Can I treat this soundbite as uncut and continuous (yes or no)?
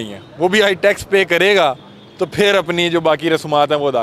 yes